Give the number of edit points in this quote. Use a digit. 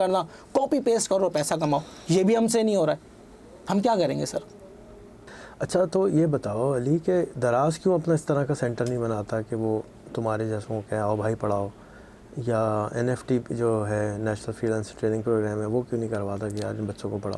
0